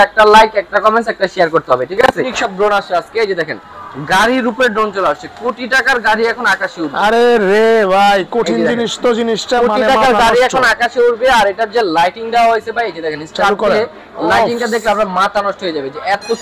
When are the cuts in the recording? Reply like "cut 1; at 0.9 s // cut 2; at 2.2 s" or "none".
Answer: cut 1; at 2.3 s